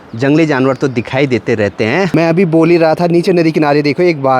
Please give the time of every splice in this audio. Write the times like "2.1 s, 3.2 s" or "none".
2.1 s